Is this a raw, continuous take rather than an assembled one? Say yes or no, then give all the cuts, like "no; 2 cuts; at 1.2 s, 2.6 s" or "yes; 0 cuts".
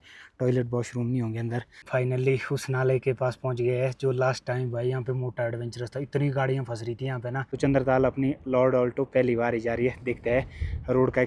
no; 2 cuts; at 1.8 s, 7.5 s